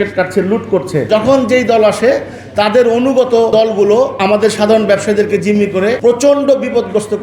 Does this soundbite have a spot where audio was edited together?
yes; 3 cuts; at 1.1 s, 4.0 s, 6.0 s

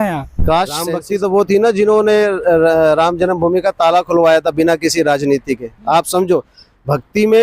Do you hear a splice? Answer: yes; 1 cut; at 0.9 s

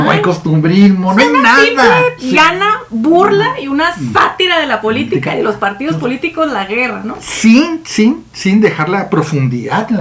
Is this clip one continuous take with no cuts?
yes; 0 cuts

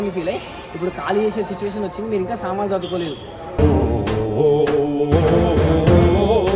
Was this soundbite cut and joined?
no; 0 cuts

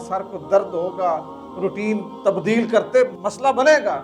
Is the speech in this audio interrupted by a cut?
yes; 2 cuts; at 2.1 s, 3.1 s

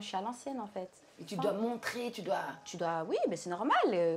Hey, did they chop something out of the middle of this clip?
yes; 1 cut; at 1.2 s

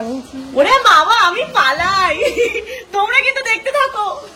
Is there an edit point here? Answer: no; 0 cuts

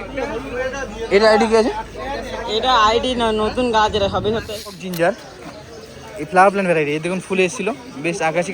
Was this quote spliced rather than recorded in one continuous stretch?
yes; 1 cut; at 4.8 s

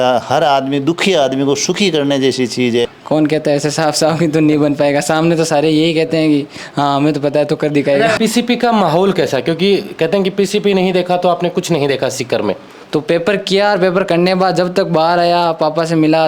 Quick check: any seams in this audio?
yes; 3 cuts; at 2.9 s, 8.2 s, 12.7 s

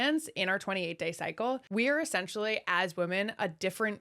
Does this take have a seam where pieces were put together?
yes; 1 cut; at 1.6 s

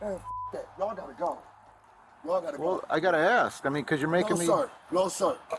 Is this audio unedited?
no; 1 cut; at 4.6 s

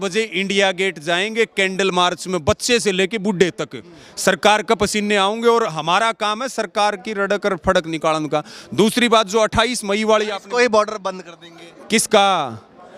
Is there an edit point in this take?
no; 0 cuts

